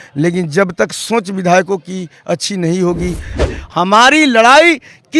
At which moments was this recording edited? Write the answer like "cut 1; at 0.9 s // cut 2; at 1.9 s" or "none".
cut 1; at 3.4 s